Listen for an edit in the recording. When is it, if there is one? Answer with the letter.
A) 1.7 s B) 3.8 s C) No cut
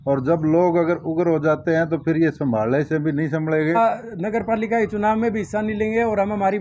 B